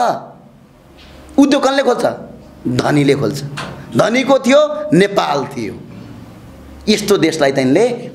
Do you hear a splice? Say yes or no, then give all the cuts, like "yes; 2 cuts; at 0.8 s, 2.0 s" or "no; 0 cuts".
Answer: no; 0 cuts